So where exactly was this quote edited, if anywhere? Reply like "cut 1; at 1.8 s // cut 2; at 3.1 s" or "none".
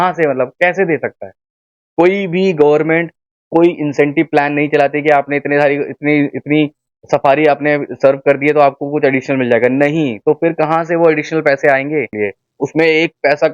cut 1; at 12.1 s